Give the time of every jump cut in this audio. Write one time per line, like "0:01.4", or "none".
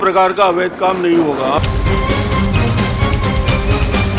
0:01.6

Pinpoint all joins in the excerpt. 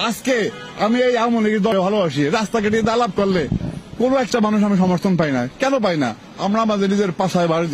0:01.7

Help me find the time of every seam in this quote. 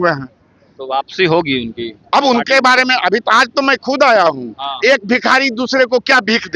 none

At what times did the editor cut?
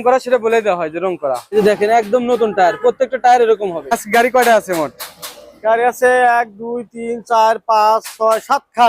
0:01.5
0:03.9

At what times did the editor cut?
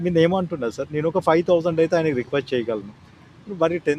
none

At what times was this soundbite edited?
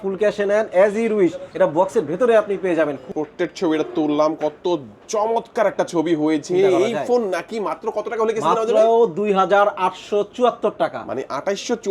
0:03.1

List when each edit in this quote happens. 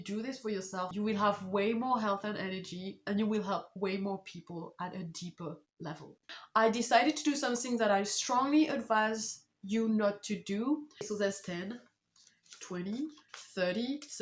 0:00.9
0:06.4
0:11.1

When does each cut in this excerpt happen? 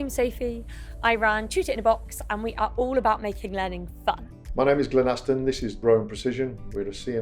0:04.4

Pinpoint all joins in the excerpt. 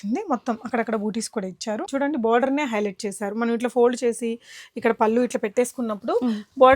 0:01.8

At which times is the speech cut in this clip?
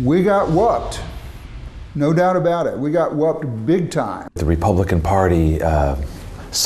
0:04.3

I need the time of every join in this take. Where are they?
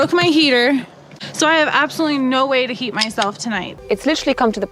0:03.7

